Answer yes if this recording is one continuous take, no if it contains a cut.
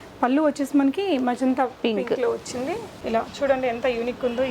no